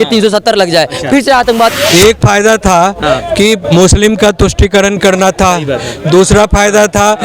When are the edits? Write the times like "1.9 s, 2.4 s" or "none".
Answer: 1.7 s